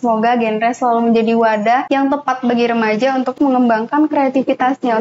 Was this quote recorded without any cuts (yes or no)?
no